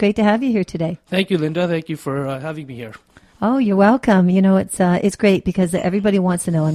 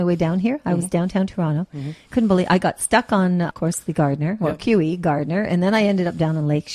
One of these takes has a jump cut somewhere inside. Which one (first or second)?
second